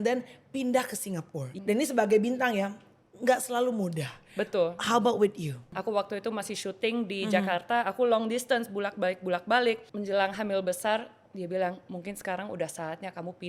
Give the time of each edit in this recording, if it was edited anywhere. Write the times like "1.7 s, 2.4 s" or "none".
1.4 s, 5.8 s, 9.9 s